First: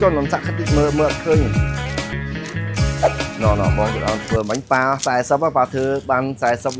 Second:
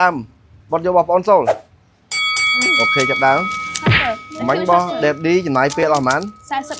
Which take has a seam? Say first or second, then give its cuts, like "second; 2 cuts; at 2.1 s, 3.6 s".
first; 1 cut; at 2.1 s